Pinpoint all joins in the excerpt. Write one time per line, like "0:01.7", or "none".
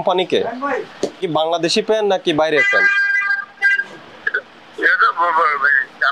0:01.1